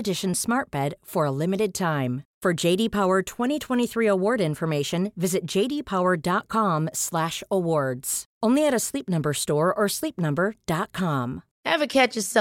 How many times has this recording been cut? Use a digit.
1